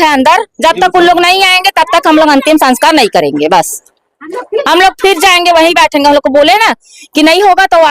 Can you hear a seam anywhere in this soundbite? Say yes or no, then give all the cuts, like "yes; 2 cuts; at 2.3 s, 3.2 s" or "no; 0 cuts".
no; 0 cuts